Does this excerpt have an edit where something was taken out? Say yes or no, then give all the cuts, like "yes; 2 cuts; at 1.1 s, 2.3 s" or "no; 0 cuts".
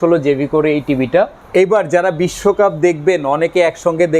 yes; 1 cut; at 1.4 s